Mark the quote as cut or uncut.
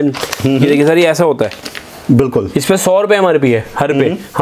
uncut